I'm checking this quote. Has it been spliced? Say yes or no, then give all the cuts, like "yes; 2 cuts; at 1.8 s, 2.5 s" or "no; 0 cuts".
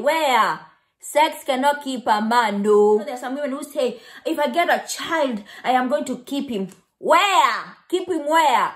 yes; 1 cut; at 3.2 s